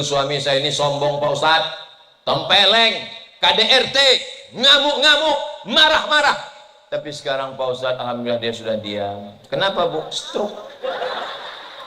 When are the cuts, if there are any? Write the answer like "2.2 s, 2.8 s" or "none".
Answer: none